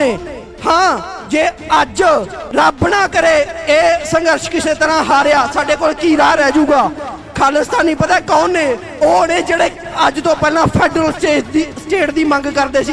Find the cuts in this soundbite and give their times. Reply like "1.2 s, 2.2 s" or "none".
2.4 s